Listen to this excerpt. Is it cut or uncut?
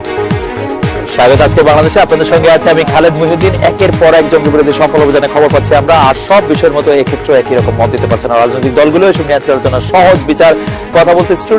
cut